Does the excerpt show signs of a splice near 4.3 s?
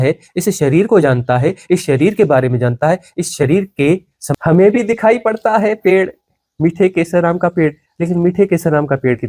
yes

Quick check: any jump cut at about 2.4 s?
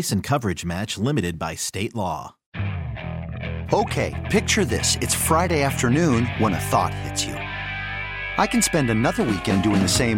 yes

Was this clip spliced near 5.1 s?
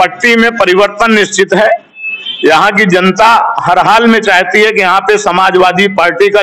no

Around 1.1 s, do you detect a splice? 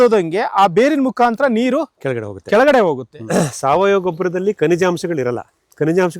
no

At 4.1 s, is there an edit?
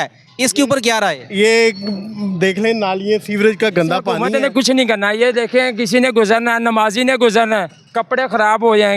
yes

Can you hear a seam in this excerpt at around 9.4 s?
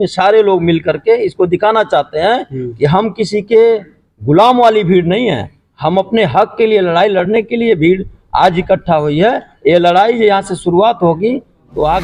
no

